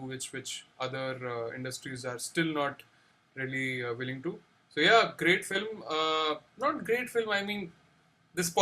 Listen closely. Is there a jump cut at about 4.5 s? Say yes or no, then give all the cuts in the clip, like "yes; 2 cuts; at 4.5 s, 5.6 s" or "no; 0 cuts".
yes; 1 cut; at 4.5 s